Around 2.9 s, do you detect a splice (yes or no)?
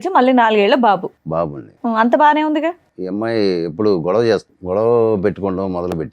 yes